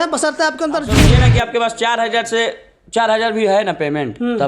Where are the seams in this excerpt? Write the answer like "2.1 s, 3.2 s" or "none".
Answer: 1.1 s